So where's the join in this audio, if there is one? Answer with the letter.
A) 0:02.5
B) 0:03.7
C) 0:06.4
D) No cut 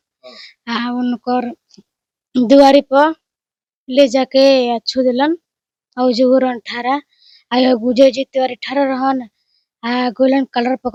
D